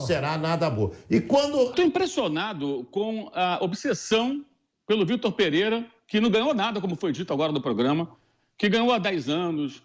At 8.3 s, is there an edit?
no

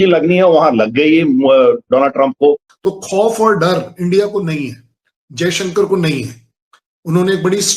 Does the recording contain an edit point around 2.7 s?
yes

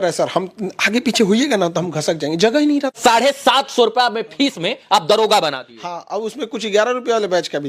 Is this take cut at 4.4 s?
no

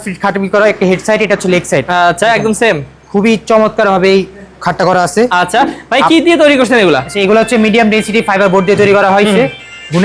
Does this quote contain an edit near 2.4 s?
no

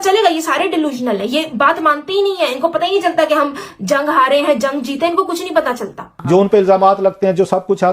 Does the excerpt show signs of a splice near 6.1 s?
yes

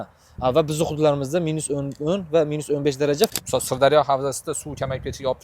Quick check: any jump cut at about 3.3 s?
yes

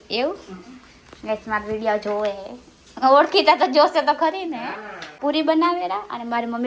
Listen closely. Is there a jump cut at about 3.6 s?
no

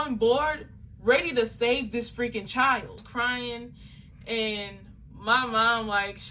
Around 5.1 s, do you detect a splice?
no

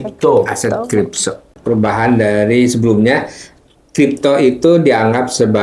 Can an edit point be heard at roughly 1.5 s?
yes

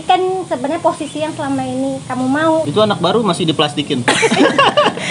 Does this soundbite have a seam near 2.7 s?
yes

